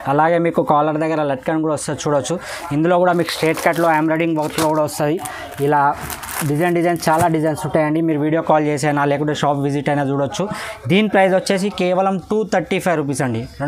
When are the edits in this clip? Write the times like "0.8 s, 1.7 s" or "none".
none